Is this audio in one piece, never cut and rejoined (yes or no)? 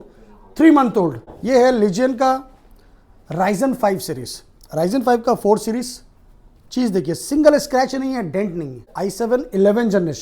no